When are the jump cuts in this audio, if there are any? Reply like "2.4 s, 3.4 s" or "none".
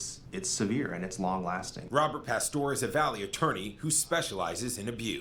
none